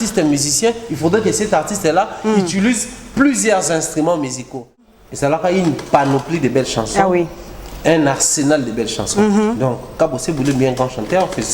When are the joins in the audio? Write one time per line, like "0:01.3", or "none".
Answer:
0:04.8